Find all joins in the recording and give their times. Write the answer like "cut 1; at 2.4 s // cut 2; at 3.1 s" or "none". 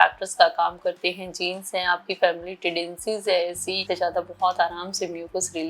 cut 1; at 3.8 s